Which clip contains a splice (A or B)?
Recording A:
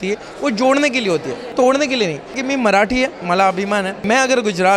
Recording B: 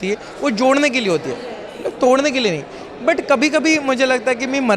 A